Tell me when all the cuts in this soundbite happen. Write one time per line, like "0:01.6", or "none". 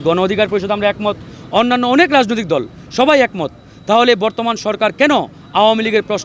none